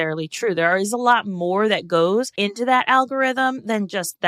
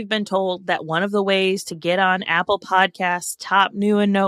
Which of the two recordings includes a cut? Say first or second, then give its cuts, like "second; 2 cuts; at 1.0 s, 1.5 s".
first; 1 cut; at 2.3 s